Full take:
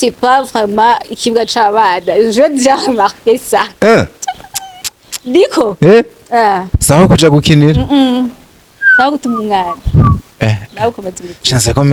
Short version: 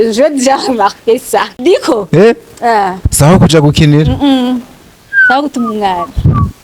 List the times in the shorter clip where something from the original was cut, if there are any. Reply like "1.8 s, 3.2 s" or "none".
1.5 s